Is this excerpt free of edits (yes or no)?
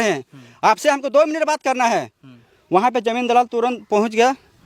yes